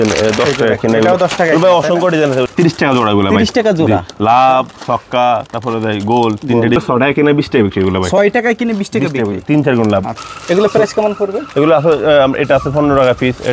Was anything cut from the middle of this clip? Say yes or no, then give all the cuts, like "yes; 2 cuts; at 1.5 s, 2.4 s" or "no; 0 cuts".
yes; 3 cuts; at 2.5 s, 6.8 s, 10.2 s